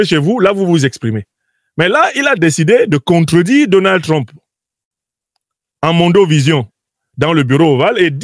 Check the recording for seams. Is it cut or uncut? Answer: uncut